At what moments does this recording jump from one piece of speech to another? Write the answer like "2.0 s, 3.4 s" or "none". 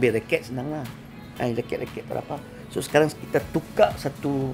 none